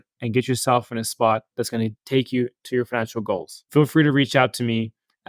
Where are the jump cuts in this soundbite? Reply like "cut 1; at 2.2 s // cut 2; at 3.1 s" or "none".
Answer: cut 1; at 3.6 s